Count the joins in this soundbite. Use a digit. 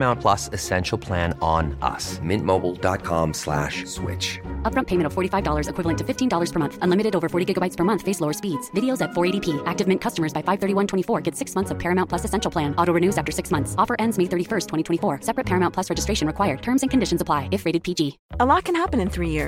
1